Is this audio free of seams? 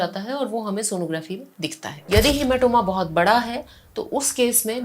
no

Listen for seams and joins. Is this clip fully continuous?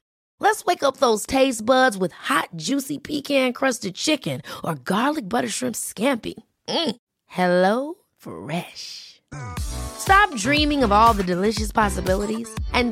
yes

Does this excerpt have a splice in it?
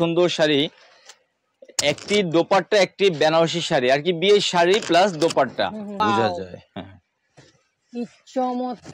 yes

